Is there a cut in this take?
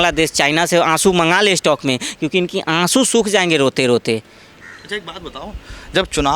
no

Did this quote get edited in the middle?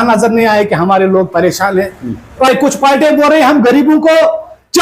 yes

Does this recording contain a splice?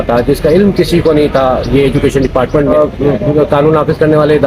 yes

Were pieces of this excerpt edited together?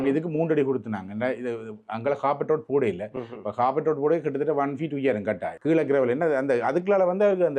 yes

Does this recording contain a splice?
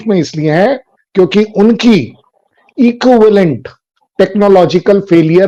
no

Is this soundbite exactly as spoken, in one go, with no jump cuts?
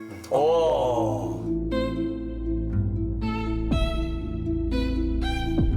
no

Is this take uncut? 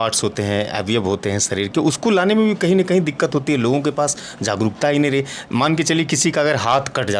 yes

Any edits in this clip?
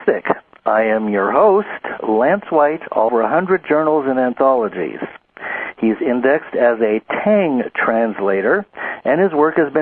no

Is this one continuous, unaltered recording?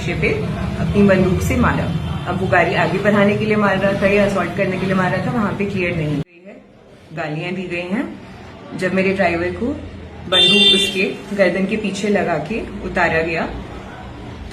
no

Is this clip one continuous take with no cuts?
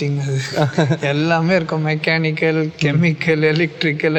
yes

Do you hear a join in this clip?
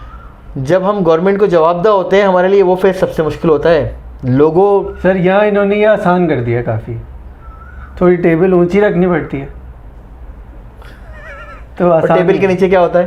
no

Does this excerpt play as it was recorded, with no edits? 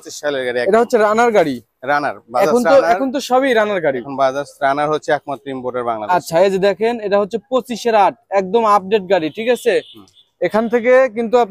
yes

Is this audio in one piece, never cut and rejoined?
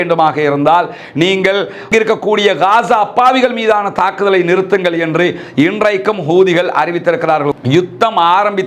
no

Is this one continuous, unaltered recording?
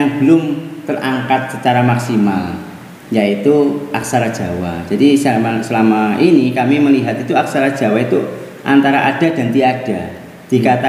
yes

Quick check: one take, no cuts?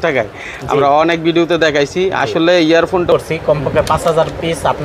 no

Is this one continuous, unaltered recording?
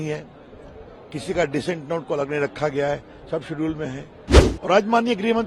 yes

